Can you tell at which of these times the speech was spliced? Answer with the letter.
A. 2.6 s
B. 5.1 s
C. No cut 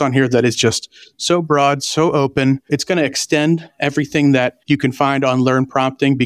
A